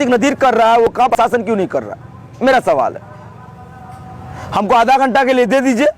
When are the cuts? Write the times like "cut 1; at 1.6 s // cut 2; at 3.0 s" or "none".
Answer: cut 1; at 1.1 s